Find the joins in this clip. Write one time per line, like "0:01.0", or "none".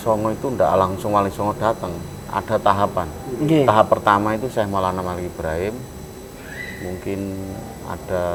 none